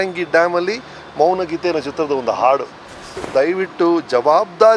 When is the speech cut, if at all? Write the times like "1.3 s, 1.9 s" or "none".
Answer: 3.2 s